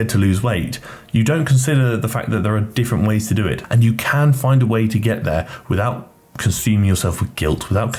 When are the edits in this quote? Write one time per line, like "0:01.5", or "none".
0:03.6